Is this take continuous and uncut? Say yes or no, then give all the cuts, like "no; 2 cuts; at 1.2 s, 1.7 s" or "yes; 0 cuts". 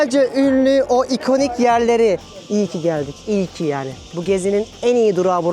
no; 1 cut; at 2.3 s